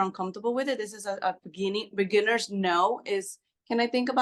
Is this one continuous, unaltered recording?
yes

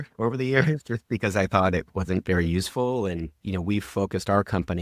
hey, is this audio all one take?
no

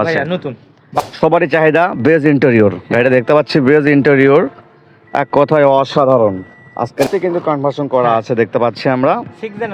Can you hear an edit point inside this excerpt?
yes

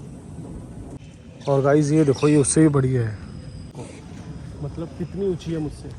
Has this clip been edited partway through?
yes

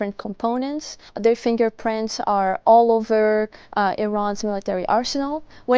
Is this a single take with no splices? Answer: no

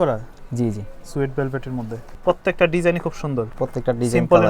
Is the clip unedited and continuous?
no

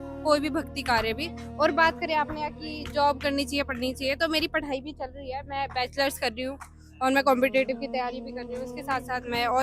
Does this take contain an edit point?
no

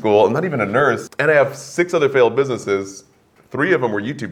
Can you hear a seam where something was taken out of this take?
yes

